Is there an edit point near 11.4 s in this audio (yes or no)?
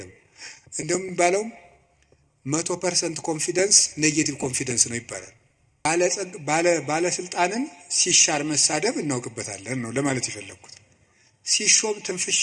no